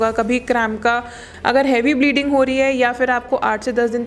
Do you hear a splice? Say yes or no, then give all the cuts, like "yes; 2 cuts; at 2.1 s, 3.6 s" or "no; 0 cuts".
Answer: yes; 1 cut; at 1.3 s